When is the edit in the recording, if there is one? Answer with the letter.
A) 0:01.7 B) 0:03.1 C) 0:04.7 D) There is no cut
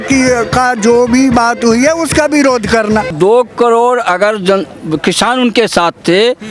B